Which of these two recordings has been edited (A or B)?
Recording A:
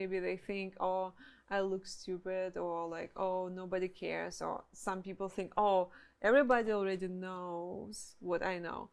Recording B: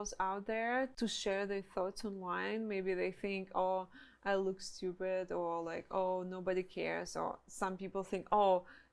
B